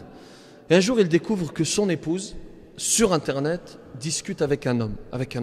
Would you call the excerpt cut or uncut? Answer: uncut